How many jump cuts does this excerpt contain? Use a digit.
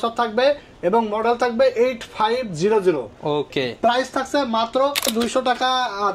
1